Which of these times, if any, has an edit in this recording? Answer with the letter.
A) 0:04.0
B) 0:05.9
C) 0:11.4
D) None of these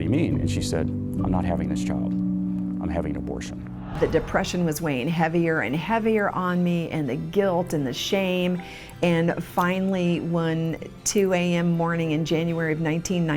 A